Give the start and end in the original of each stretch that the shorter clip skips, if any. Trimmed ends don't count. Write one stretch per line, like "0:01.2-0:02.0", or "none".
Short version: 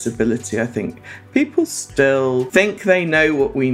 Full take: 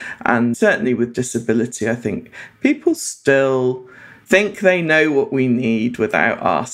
0:03.8-0:04.2